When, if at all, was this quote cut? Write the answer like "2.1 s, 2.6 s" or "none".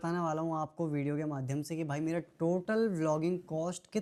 none